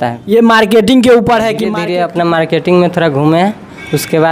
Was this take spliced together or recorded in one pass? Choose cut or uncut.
cut